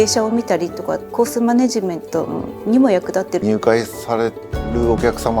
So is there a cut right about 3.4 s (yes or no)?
yes